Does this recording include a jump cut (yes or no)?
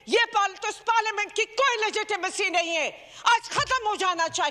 no